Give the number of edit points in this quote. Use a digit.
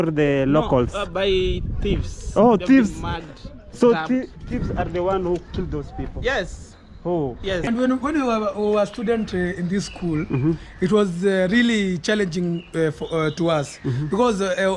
1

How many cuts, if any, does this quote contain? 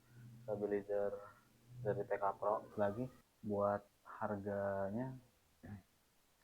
1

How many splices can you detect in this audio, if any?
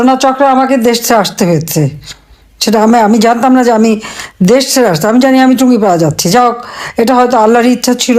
0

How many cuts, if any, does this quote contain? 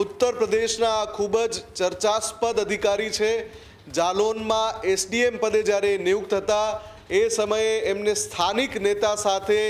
0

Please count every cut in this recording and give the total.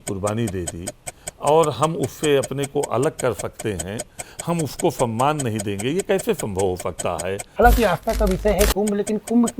1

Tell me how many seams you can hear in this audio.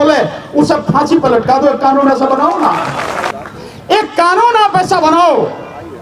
1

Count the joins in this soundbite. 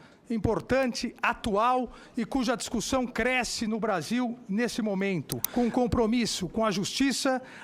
1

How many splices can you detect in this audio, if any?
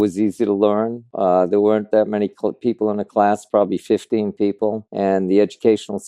1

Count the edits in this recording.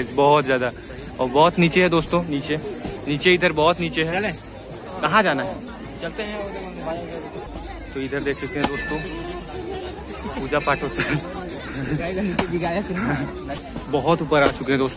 0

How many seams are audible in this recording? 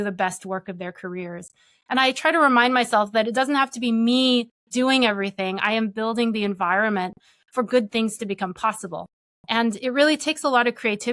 0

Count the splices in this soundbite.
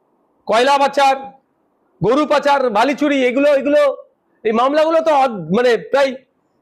0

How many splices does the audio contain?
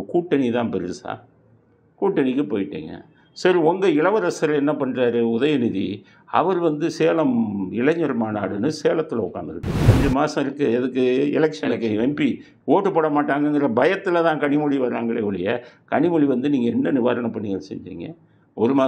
1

